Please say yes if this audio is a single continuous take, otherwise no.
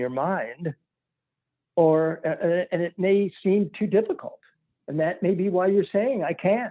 yes